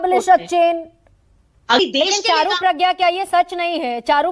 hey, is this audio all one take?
no; 1 cut; at 1.8 s

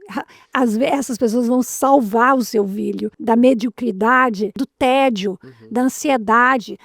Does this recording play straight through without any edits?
no; 2 cuts; at 3.1 s, 4.7 s

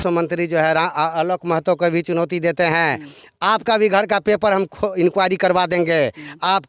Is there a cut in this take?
no; 0 cuts

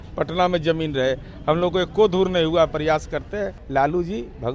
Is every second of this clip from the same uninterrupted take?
no; 1 cut; at 3.6 s

